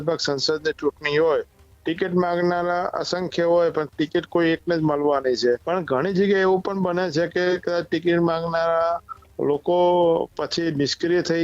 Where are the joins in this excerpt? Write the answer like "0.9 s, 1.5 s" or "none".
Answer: 5.6 s